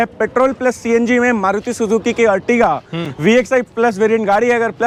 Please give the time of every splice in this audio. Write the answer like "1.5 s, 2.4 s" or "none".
none